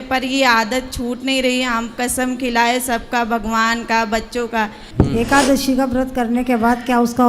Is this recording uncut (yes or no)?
no